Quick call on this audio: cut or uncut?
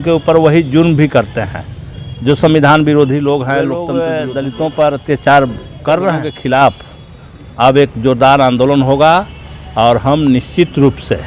cut